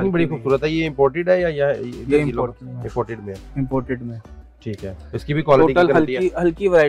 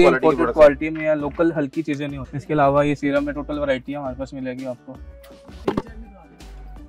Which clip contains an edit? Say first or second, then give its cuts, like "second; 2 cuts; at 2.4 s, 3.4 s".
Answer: second; 1 cut; at 2.2 s